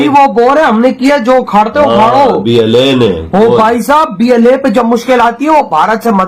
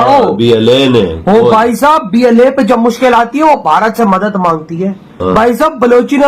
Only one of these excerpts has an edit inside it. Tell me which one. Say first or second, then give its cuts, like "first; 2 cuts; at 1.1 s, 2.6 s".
second; 1 cut; at 5.2 s